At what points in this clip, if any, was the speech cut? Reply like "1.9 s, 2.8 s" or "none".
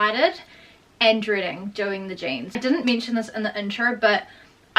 none